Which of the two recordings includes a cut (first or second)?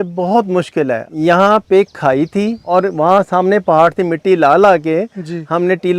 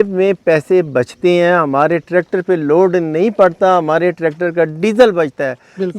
first